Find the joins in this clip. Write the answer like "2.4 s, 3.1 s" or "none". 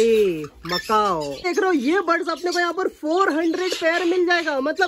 1.5 s